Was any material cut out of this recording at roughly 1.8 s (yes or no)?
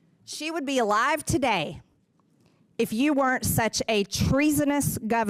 no